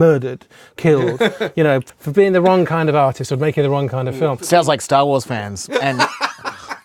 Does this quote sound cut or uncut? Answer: cut